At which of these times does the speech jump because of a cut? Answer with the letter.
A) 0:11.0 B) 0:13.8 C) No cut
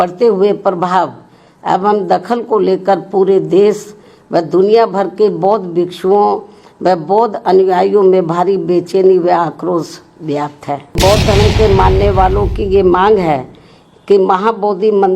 A